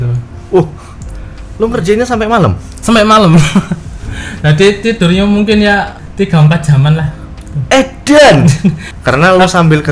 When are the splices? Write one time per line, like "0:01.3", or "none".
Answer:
0:06.0
0:08.9